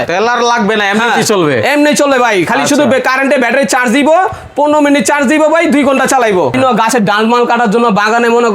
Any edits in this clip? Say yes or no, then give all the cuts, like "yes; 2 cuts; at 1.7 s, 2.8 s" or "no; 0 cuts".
yes; 1 cut; at 6.6 s